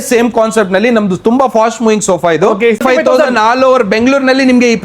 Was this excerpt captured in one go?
no; 1 cut; at 2.8 s

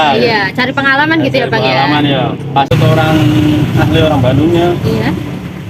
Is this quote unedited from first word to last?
no; 1 cut; at 2.7 s

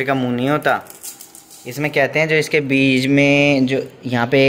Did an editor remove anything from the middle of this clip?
no; 0 cuts

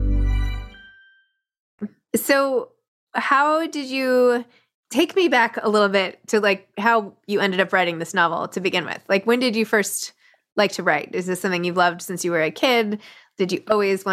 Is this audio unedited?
yes; 0 cuts

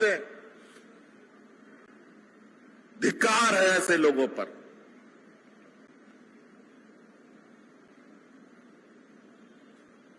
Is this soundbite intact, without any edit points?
yes; 0 cuts

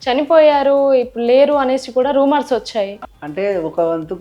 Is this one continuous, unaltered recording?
no; 1 cut; at 3.0 s

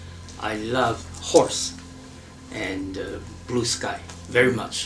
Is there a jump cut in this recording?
no; 0 cuts

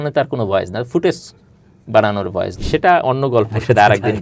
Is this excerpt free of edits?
no; 1 cut; at 2.6 s

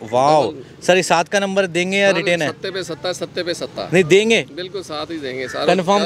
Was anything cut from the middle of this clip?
no; 0 cuts

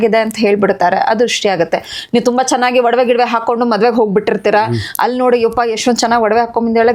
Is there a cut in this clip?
no; 0 cuts

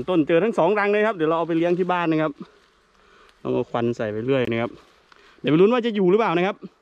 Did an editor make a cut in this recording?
no; 0 cuts

